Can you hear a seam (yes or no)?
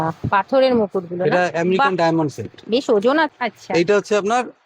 yes